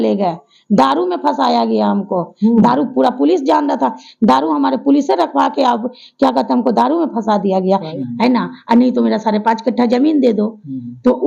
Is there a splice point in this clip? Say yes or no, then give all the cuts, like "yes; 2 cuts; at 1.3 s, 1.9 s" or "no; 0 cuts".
yes; 1 cut; at 7.9 s